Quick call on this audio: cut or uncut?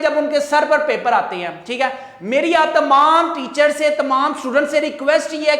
uncut